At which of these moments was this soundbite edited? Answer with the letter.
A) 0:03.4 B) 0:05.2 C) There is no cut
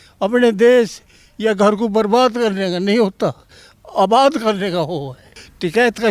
B